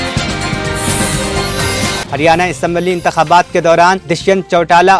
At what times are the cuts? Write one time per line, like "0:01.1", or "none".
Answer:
0:02.0